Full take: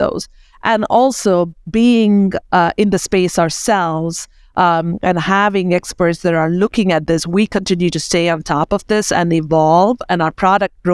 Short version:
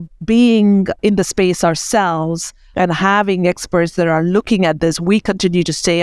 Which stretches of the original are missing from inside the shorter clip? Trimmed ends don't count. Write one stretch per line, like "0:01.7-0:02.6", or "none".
0:02.4-0:02.7
0:04.4-0:04.9